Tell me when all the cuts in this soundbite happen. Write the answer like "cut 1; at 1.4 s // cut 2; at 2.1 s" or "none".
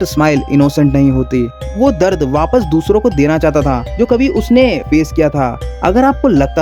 cut 1; at 1.6 s // cut 2; at 5.6 s